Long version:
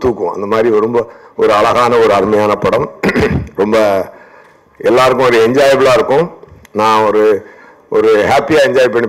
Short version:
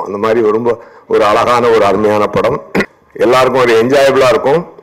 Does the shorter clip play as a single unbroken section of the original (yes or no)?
no